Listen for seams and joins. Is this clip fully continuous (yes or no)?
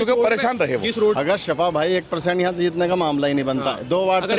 no